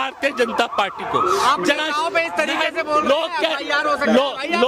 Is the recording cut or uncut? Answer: uncut